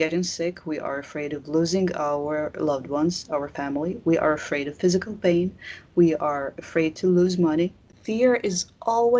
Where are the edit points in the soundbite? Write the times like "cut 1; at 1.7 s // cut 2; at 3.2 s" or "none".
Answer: cut 1; at 7.9 s